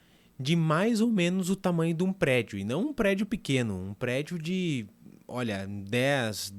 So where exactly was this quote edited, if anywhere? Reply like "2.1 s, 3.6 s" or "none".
none